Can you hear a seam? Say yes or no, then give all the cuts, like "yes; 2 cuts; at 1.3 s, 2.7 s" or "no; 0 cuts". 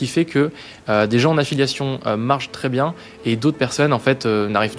no; 0 cuts